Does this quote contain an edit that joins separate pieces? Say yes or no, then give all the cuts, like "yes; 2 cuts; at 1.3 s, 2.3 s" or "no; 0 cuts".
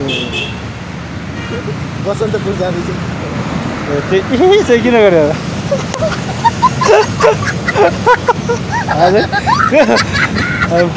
no; 0 cuts